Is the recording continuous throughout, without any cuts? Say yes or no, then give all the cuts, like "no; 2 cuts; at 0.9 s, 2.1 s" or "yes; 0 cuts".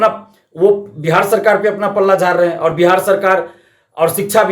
yes; 0 cuts